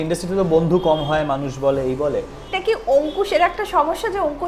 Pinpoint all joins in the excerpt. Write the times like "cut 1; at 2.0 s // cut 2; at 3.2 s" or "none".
cut 1; at 2.6 s